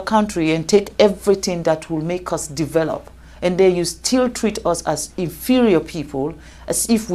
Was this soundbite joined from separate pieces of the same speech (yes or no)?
no